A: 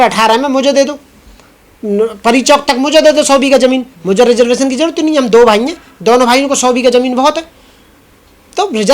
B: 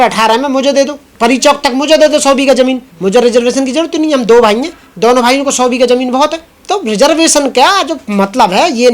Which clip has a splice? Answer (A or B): B